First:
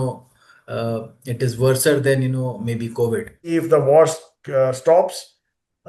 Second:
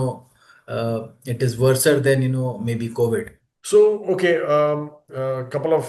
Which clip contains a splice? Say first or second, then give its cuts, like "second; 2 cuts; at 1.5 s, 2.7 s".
first; 1 cut; at 3.5 s